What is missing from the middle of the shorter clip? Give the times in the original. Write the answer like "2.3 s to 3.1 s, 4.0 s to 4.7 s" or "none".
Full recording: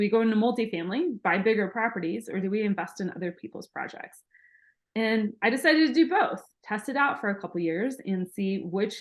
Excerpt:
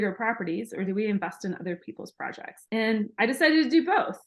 4.1 s to 4.7 s